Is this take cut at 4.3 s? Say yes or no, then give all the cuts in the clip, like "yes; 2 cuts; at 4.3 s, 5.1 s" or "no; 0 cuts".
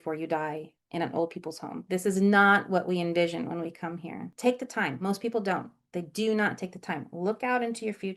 yes; 1 cut; at 4.3 s